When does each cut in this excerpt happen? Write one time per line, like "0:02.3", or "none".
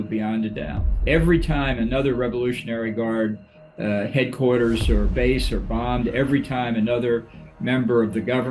0:01.0